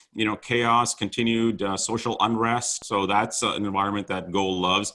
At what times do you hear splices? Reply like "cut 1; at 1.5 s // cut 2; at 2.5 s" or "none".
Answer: cut 1; at 2.8 s